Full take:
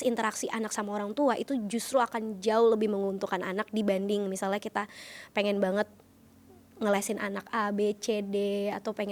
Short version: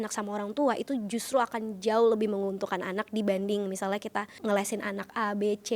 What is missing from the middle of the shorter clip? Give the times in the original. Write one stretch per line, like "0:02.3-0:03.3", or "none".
0:04.9-0:06.7